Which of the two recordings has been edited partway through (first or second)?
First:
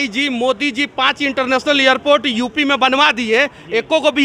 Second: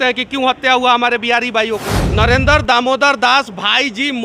second